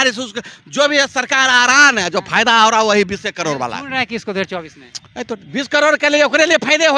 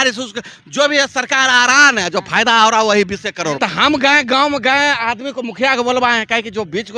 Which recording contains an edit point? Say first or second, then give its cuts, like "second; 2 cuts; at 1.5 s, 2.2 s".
second; 1 cut; at 3.6 s